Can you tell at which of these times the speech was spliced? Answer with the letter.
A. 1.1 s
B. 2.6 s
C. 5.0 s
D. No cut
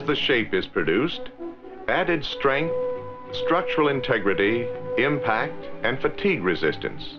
C